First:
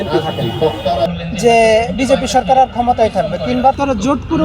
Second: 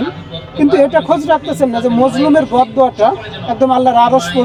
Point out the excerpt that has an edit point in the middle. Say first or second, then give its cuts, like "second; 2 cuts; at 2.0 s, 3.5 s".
first; 1 cut; at 1.1 s